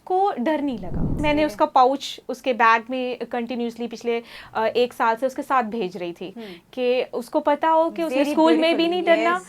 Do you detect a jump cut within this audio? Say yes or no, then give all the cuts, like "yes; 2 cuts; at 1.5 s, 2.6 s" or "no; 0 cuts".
yes; 1 cut; at 1.2 s